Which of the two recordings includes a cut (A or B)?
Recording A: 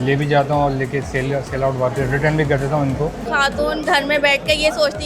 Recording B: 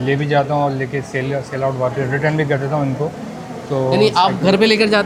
A